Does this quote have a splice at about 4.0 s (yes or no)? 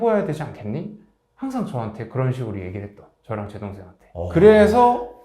yes